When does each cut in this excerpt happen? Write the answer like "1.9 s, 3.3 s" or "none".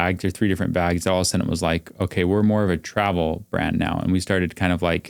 none